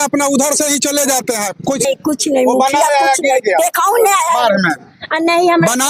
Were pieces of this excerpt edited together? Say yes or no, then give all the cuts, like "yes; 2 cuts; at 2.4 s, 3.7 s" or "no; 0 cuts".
yes; 1 cut; at 1.8 s